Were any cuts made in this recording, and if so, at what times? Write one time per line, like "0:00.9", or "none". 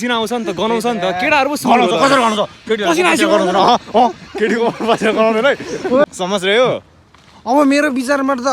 0:06.1